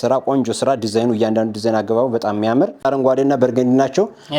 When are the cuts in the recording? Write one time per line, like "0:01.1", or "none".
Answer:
0:02.8